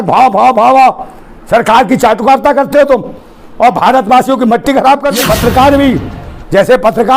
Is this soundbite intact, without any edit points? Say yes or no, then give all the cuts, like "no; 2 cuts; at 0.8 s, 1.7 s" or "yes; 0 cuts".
no; 1 cut; at 5.2 s